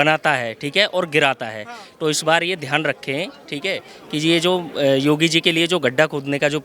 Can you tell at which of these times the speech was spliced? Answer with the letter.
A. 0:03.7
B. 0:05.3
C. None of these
C